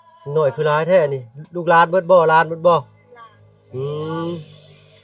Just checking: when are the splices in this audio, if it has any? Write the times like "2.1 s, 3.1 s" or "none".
none